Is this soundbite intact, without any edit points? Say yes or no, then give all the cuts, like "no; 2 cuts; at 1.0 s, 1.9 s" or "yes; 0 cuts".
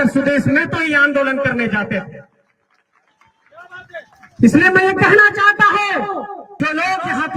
no; 1 cut; at 6.5 s